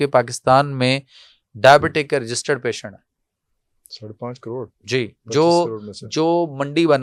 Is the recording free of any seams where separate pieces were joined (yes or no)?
yes